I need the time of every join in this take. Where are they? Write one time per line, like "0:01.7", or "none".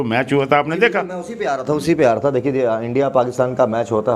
none